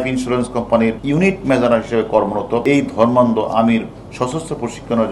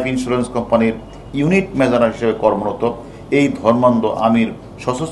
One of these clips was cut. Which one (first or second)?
first